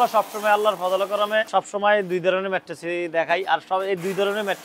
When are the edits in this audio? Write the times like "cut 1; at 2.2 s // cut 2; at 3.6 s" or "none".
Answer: cut 1; at 1.5 s